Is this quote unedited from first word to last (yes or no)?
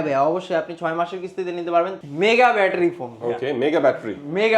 no